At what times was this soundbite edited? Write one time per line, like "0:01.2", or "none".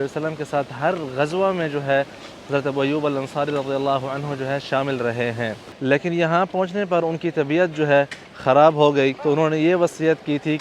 0:05.6
0:09.2

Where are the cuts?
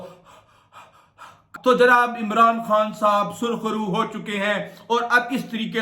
0:01.5

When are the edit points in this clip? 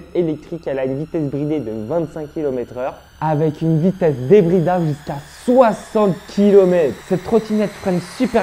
0:07.0

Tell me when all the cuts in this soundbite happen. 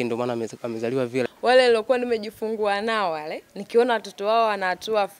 0:01.3

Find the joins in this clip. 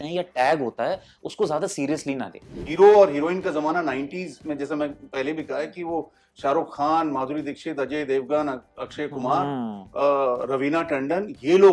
0:02.6

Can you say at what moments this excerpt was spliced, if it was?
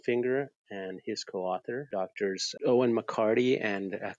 0:01.9

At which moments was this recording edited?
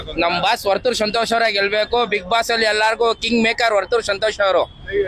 none

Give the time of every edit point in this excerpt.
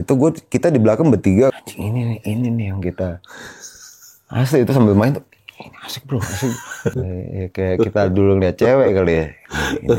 0:01.5
0:07.0

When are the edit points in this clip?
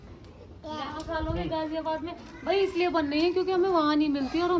none

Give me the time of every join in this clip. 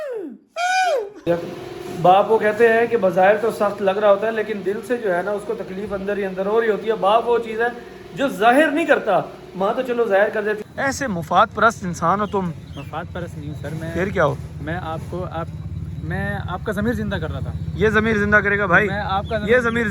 0:01.3
0:10.6

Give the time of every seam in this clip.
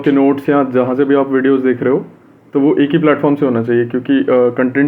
none

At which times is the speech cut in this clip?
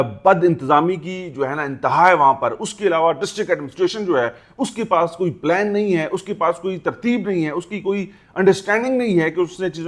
none

